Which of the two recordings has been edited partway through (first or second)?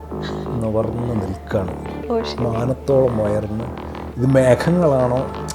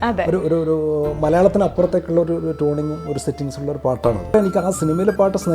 second